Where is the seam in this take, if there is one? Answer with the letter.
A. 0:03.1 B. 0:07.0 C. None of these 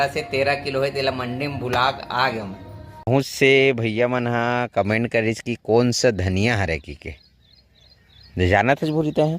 A